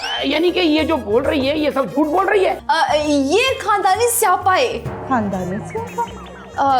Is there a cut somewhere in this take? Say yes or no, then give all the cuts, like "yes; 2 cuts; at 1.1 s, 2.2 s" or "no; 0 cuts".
yes; 1 cut; at 2.6 s